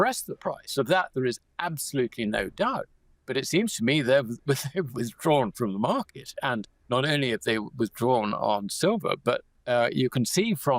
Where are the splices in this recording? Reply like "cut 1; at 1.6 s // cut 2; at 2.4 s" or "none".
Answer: cut 1; at 6.7 s // cut 2; at 9.5 s